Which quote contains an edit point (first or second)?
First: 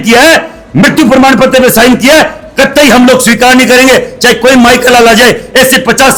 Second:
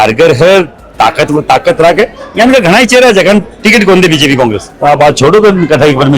second